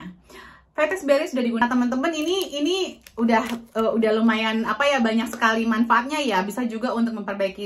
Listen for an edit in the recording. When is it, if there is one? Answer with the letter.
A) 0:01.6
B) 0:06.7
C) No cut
A